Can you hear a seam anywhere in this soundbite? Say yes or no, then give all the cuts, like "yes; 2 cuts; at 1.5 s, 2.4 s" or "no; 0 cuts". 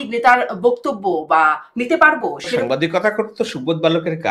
yes; 1 cut; at 2.6 s